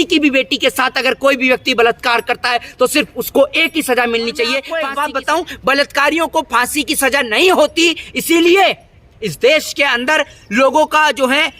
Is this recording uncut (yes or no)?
no